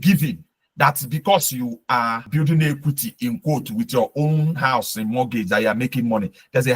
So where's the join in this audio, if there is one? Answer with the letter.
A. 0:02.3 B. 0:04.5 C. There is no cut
A